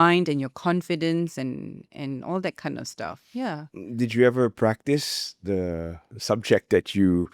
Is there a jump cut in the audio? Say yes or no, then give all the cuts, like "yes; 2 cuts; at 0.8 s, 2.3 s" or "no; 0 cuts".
no; 0 cuts